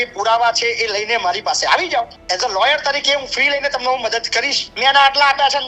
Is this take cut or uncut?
cut